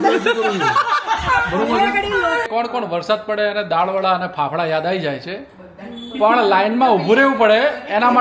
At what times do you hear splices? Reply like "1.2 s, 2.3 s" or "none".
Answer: 2.5 s